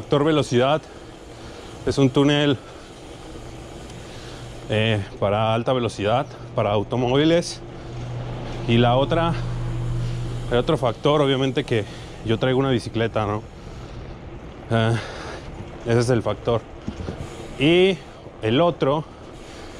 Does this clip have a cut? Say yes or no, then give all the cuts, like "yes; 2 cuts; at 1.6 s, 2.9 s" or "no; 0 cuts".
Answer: no; 0 cuts